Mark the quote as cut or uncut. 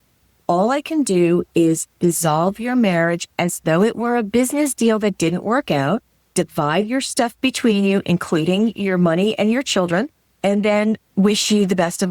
cut